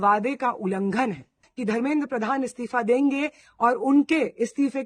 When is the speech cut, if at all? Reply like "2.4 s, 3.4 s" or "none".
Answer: 1.5 s